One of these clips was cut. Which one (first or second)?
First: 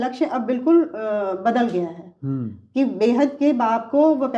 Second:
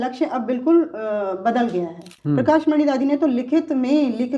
second